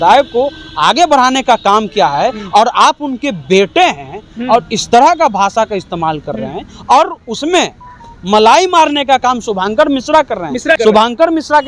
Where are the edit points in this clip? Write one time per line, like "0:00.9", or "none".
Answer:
0:10.8